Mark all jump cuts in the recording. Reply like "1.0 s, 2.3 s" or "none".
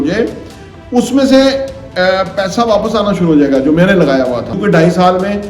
4.6 s